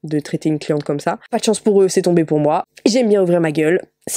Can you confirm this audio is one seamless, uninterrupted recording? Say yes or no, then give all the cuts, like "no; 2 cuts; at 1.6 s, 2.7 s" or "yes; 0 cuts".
yes; 0 cuts